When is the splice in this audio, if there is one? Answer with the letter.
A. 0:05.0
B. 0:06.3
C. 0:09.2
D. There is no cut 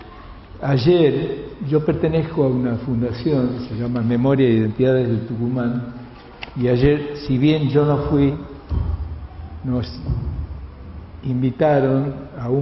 A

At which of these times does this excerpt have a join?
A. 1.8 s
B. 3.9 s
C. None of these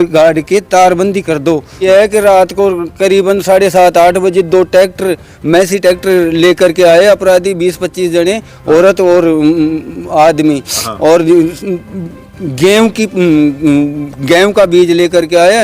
A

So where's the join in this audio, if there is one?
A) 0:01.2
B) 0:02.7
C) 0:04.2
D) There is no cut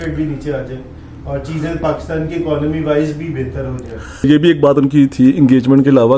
C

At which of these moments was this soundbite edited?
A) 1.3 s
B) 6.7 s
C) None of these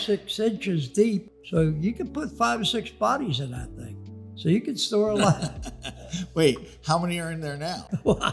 A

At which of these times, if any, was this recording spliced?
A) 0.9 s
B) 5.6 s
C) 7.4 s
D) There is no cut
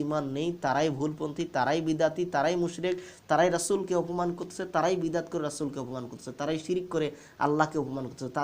D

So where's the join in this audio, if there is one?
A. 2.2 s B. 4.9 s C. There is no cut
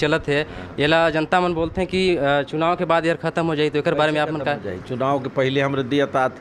C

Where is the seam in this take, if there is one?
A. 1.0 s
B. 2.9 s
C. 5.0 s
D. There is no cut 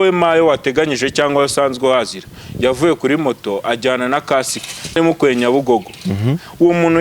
C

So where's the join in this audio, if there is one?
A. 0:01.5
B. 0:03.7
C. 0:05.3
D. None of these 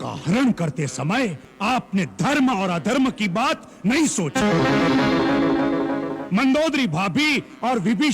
A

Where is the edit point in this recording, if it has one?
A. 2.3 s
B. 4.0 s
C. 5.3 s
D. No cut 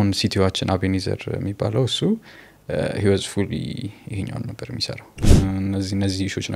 C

